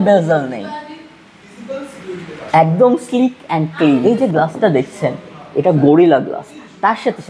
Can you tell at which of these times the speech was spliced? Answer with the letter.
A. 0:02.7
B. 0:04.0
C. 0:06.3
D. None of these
B